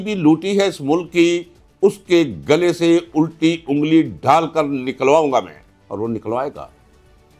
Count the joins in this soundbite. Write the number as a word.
zero